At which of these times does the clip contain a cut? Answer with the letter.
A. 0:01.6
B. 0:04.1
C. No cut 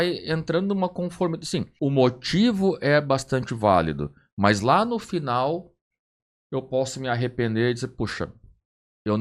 A